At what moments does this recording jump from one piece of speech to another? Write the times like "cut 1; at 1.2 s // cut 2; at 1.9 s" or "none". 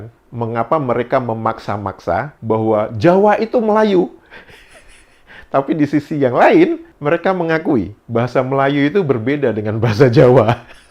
none